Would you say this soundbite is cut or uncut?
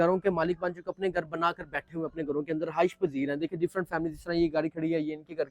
uncut